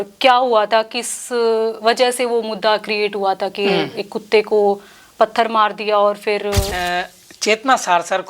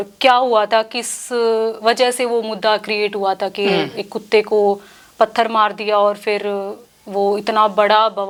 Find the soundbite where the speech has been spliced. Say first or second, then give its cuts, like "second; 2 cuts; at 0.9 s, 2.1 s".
first; 1 cut; at 6.7 s